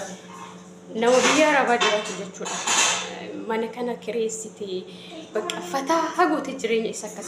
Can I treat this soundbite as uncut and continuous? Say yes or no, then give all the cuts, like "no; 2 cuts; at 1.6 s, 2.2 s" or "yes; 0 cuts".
yes; 0 cuts